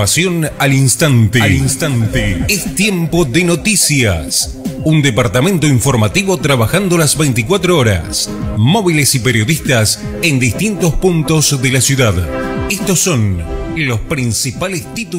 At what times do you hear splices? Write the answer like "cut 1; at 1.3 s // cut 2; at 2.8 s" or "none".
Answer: none